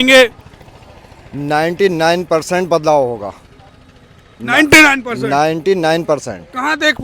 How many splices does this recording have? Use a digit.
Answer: 0